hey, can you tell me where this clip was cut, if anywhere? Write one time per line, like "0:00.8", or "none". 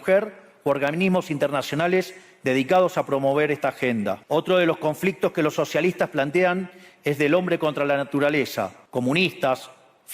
0:04.2
0:08.8